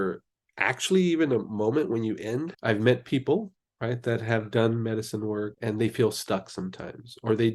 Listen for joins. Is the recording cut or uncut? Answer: cut